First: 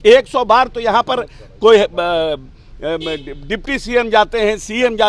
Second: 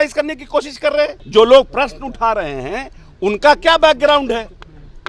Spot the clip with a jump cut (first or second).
second